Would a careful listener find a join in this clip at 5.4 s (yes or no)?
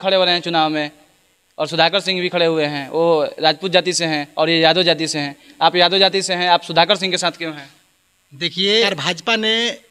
no